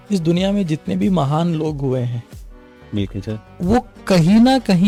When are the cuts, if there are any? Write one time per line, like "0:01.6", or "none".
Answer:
none